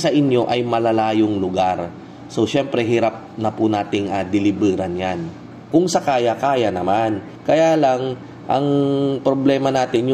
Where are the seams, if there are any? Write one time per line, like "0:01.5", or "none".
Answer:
0:05.6